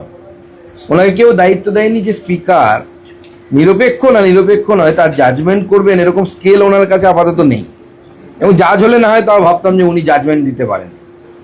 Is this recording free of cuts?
yes; 0 cuts

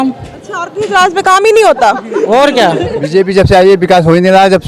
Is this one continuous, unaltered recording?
no; 1 cut; at 3.1 s

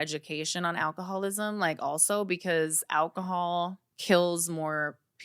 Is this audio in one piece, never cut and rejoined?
no; 1 cut; at 3.9 s

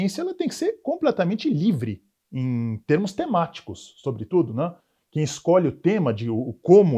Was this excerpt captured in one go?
yes; 0 cuts

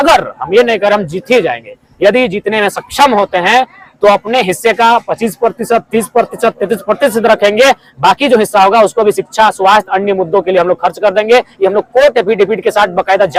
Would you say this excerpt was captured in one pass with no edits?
yes; 0 cuts

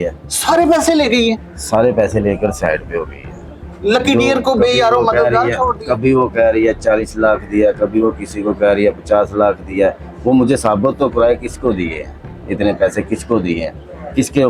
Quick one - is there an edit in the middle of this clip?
no; 0 cuts

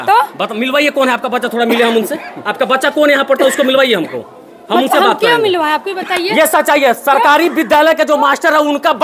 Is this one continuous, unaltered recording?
yes; 0 cuts

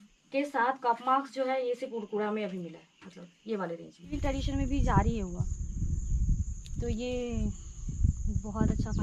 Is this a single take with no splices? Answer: no; 1 cut; at 4.2 s

